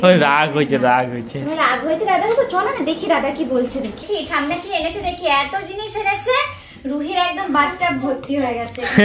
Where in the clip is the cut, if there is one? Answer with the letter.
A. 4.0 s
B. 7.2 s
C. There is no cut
A